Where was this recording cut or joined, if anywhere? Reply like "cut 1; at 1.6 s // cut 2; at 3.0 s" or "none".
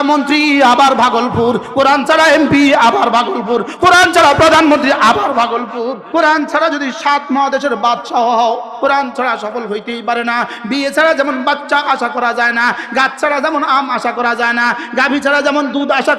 cut 1; at 6.0 s // cut 2; at 8.7 s